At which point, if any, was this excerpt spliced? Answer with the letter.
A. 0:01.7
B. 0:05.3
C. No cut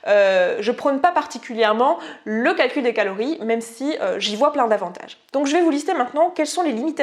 C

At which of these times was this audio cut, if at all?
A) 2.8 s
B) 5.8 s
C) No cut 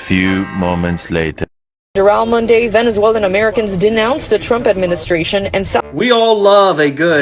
B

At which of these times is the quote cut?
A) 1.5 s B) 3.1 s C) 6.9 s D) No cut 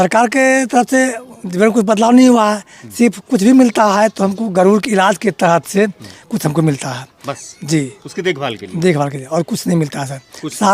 D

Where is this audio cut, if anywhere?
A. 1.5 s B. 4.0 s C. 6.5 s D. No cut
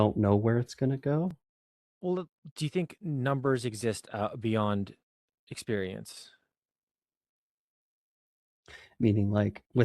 A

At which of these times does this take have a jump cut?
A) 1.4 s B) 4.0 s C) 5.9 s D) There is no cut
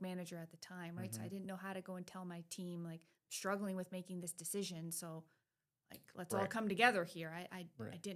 D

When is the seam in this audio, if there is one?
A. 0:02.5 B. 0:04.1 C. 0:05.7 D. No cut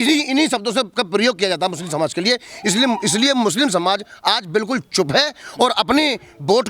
D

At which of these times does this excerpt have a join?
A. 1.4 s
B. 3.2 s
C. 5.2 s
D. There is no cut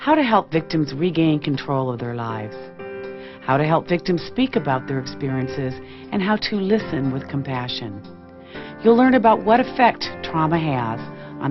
D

